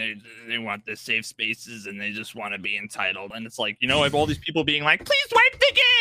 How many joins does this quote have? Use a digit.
1